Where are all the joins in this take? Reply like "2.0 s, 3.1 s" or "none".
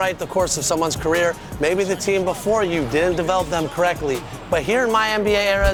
none